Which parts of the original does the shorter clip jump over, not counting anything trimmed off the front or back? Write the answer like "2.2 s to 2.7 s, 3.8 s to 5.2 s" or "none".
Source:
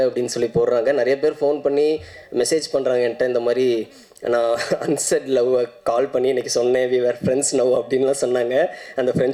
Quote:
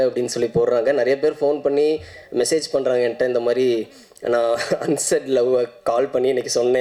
none